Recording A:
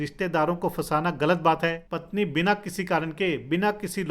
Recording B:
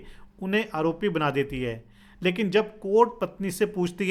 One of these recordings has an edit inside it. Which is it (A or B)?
A